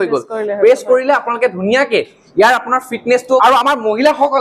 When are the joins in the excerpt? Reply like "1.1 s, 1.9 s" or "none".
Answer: 3.4 s